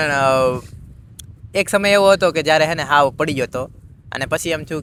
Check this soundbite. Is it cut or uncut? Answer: uncut